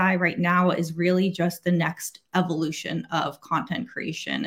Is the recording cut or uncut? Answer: uncut